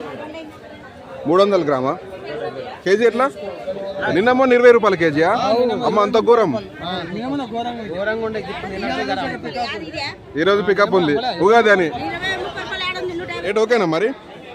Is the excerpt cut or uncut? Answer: cut